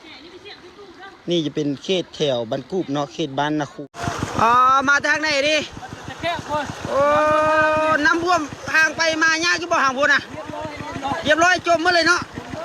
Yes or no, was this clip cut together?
yes